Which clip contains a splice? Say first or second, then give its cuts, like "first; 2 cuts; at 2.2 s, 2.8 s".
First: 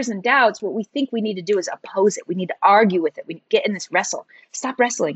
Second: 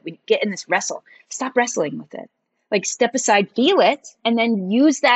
second; 1 cut; at 4.2 s